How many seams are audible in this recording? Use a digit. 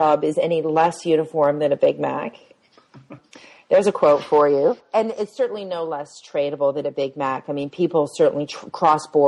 0